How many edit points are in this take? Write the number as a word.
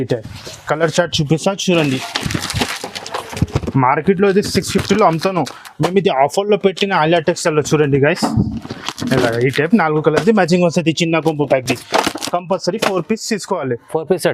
zero